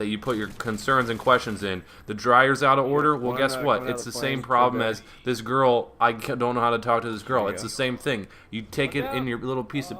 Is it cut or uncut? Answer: cut